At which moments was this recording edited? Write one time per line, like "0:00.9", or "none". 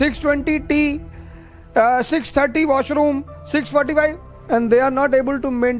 0:04.3

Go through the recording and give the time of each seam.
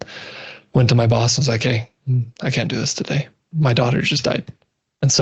0:03.4

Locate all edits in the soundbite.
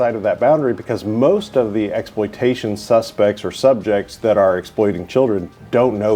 none

